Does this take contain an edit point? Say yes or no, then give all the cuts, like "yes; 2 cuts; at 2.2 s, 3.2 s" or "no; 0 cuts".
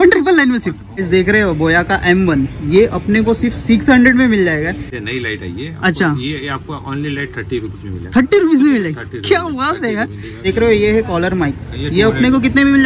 yes; 3 cuts; at 1.0 s, 4.9 s, 10.4 s